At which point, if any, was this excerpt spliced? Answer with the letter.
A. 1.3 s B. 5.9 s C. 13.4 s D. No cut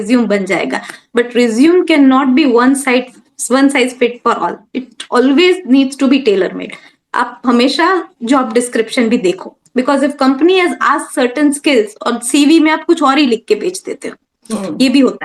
D